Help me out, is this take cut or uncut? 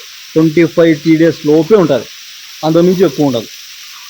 uncut